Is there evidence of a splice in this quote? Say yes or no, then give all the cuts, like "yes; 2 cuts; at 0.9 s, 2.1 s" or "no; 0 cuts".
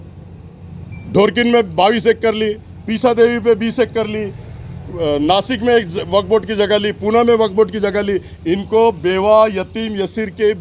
no; 0 cuts